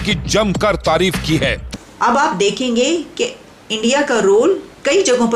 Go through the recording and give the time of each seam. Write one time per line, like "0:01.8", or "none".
0:01.6